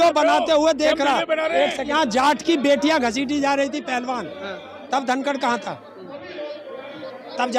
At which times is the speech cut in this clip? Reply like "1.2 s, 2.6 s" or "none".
1.9 s